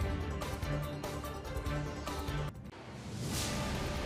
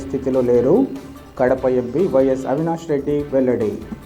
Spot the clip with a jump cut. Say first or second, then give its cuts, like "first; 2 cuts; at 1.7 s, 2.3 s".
first; 1 cut; at 2.4 s